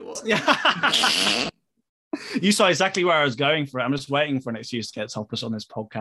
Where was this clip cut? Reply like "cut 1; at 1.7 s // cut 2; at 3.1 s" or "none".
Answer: none

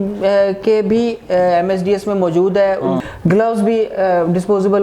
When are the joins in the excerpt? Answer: cut 1; at 3.0 s

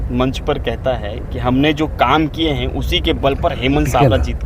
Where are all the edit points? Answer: none

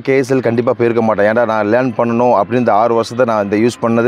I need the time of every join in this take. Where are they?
none

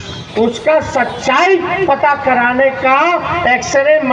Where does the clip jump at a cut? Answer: none

